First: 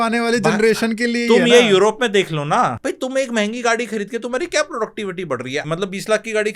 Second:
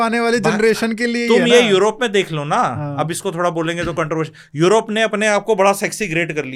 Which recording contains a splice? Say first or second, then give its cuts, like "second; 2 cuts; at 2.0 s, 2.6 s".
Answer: first; 2 cuts; at 2.8 s, 5.6 s